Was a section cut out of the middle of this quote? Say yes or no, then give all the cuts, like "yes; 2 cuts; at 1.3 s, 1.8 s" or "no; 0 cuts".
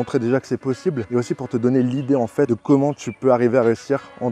yes; 2 cuts; at 1.0 s, 2.5 s